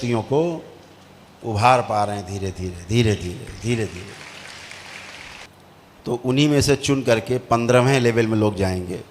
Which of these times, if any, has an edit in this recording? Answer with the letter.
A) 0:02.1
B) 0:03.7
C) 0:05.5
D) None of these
C